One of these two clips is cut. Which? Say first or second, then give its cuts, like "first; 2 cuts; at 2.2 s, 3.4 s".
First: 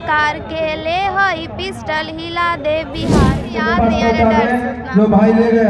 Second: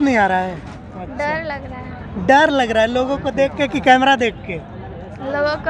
first; 1 cut; at 3.4 s